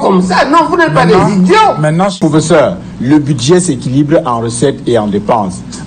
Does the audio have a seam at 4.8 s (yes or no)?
no